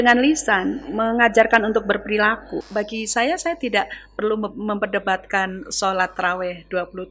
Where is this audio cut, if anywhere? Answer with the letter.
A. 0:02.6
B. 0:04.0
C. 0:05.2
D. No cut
A